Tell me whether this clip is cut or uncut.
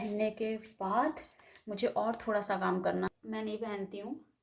cut